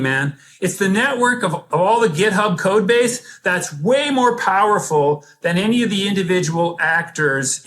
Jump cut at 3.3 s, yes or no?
no